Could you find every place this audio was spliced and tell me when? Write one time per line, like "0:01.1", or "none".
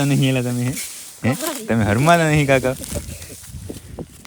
none

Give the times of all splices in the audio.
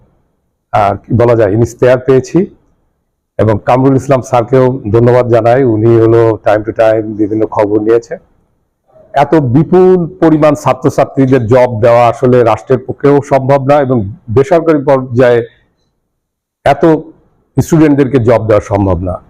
none

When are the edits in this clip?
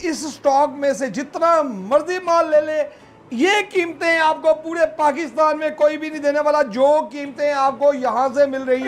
none

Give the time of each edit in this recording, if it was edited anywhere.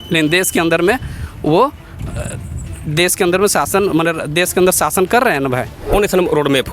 0:05.8

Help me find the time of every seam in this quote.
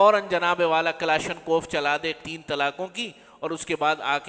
0:02.2

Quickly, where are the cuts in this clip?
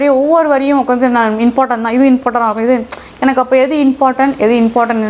none

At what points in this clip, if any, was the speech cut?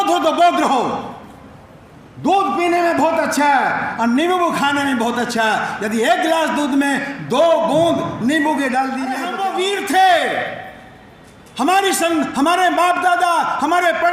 0:09.3

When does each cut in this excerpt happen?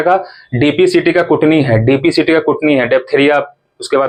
none

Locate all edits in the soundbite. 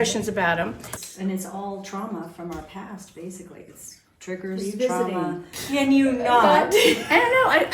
0:01.0
0:05.5

